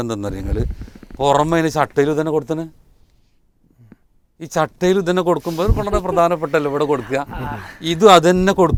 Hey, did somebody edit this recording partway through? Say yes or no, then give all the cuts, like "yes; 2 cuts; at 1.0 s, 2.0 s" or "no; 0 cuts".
no; 0 cuts